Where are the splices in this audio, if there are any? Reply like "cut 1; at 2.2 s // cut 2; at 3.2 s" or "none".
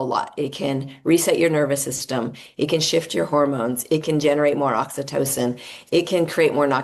none